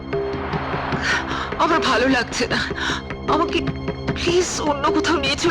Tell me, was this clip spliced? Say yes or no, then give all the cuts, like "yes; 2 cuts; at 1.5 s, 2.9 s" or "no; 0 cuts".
no; 0 cuts